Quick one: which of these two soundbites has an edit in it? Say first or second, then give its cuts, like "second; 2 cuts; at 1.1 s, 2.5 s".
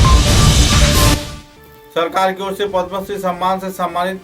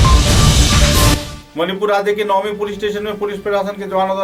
first; 1 cut; at 1.3 s